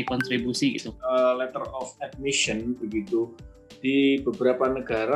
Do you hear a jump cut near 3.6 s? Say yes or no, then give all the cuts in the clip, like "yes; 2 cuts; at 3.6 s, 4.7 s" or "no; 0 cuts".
no; 1 cut; at 0.9 s